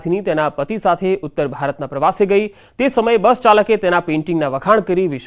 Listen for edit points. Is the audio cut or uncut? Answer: uncut